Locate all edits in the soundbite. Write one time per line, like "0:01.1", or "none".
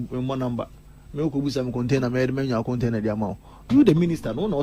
none